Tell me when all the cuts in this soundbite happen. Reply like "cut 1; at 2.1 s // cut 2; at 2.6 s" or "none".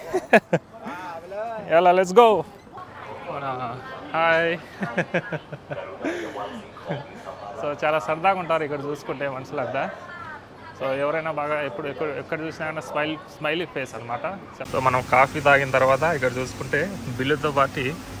cut 1; at 2.6 s // cut 2; at 14.6 s